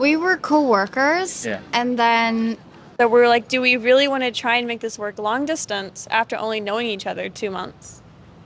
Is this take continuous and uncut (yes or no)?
no